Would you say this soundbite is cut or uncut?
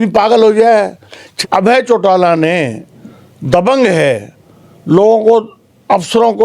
cut